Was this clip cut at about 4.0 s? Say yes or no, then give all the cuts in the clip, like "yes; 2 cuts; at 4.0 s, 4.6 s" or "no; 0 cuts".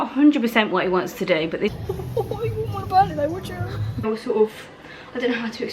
yes; 2 cuts; at 1.8 s, 4.0 s